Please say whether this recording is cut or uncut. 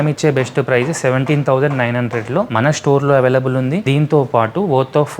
cut